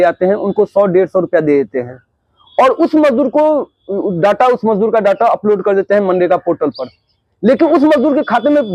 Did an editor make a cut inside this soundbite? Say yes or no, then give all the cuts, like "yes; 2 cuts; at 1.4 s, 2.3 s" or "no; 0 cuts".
no; 0 cuts